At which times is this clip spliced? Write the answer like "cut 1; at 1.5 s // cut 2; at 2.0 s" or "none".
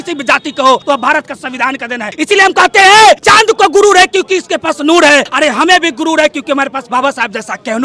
cut 1; at 0.8 s // cut 2; at 2.1 s // cut 3; at 3.2 s // cut 4; at 5.3 s